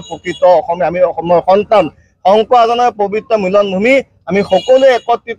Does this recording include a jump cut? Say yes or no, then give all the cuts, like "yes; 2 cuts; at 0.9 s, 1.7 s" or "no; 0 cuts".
no; 0 cuts